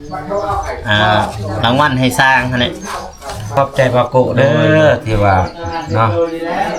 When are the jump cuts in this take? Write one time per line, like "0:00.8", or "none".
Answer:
0:03.5